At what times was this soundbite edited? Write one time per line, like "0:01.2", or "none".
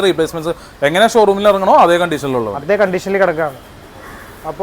none